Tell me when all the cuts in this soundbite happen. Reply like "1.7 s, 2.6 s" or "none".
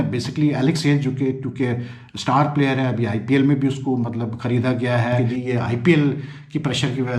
5.2 s